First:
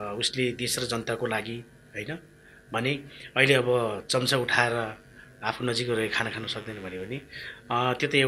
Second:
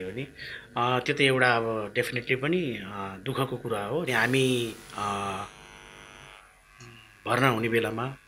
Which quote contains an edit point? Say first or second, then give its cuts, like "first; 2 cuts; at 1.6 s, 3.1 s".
second; 1 cut; at 4.1 s